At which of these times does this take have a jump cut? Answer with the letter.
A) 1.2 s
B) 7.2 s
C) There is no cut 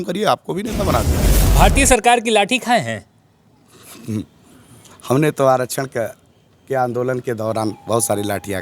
A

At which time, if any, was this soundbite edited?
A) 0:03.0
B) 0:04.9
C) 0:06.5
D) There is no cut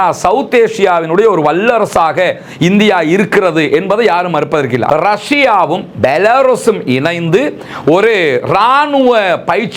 B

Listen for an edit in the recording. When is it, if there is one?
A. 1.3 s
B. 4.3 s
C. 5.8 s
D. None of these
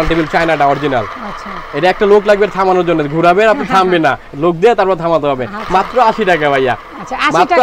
D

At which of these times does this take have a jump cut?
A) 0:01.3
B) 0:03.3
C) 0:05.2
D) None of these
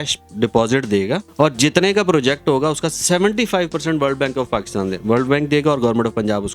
A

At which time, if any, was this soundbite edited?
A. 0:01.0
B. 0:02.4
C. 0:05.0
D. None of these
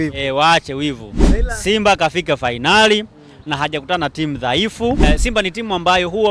C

